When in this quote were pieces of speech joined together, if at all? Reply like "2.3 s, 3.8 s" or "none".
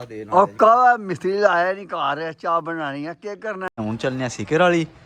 3.8 s